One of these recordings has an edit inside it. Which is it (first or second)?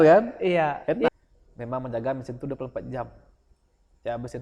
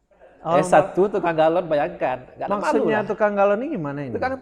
first